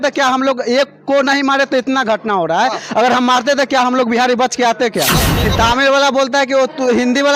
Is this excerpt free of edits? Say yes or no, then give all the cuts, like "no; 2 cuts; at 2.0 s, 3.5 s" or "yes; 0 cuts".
no; 1 cut; at 5.3 s